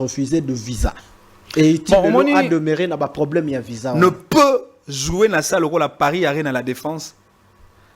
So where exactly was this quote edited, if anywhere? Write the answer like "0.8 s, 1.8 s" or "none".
3.8 s